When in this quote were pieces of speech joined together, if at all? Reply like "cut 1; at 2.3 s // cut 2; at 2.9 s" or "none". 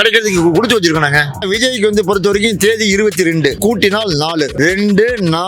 cut 1; at 1.3 s // cut 2; at 3.6 s // cut 3; at 4.5 s